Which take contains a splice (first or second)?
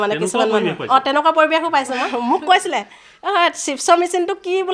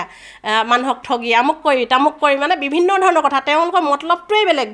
first